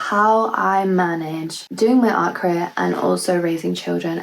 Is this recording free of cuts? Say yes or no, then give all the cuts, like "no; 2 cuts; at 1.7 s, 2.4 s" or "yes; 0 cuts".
no; 1 cut; at 1.7 s